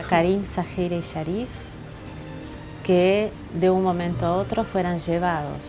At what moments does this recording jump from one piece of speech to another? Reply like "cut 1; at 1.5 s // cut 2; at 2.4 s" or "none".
none

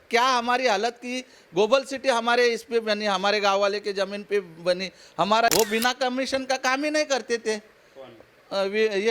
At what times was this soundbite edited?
cut 1; at 5.5 s

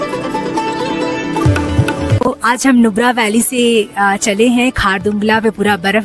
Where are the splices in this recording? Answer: none

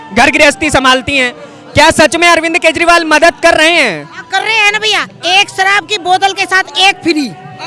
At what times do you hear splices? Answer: none

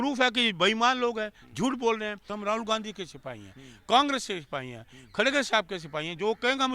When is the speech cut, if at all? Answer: cut 1; at 2.2 s

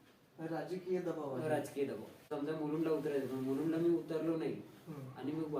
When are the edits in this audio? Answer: cut 1; at 2.2 s

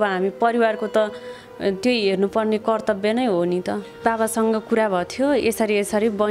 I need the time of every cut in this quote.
cut 1; at 4.0 s

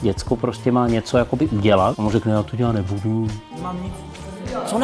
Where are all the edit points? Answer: cut 1; at 1.9 s // cut 2; at 3.5 s

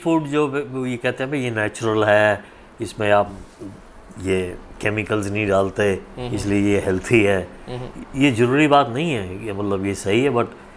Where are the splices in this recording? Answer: none

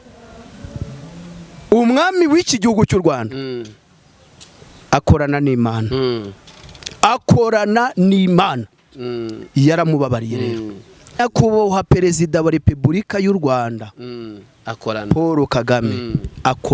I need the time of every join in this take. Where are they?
cut 1; at 11.2 s

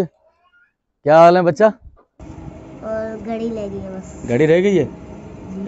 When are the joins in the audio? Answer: cut 1; at 2.1 s

